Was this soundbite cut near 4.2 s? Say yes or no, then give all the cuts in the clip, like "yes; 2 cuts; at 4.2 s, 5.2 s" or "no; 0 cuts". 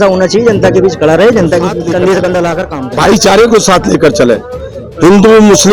no; 1 cut; at 2.8 s